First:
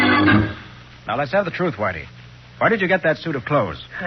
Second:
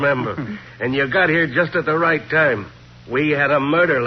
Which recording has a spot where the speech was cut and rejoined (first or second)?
first